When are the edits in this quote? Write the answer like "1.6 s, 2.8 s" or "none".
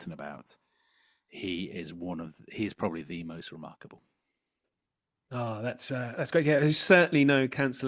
none

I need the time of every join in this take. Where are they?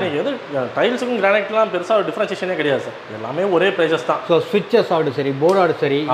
4.2 s

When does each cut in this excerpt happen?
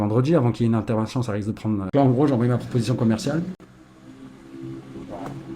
1.8 s

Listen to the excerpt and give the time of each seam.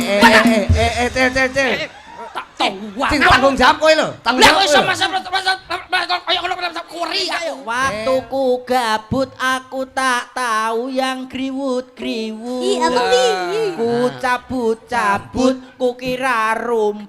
7.6 s

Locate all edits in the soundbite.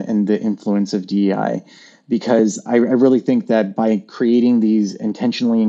none

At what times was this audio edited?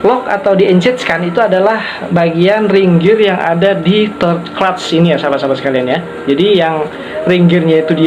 none

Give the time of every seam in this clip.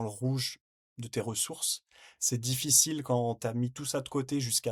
none

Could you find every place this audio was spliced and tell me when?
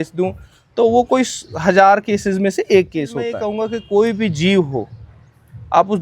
3.4 s

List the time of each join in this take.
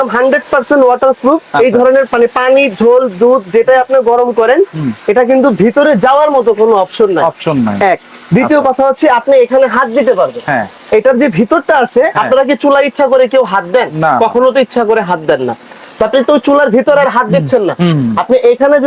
none

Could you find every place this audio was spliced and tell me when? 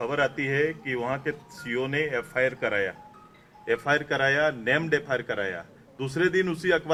none

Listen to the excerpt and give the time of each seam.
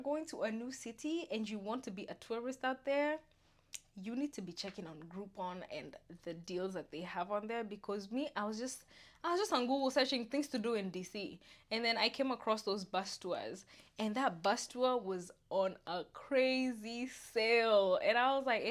none

